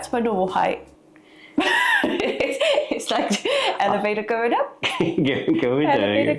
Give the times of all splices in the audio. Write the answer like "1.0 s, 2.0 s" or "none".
2.6 s